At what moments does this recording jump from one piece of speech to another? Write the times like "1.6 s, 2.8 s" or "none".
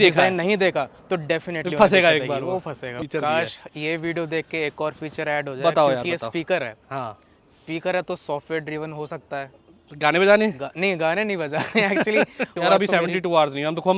3.0 s, 12.5 s